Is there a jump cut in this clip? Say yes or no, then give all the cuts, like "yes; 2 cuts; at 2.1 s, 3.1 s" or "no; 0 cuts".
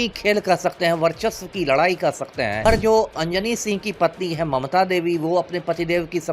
yes; 1 cut; at 2.6 s